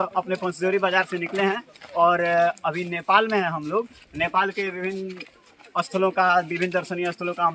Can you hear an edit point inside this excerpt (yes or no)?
no